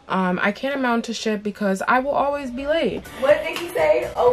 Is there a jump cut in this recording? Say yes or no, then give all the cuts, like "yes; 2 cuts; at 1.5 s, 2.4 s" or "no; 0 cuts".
yes; 1 cut; at 3.1 s